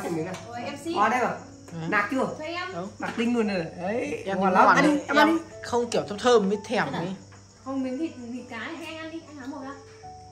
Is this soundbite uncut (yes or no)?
yes